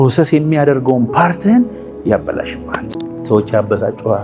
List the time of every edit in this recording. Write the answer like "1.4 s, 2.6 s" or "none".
2.9 s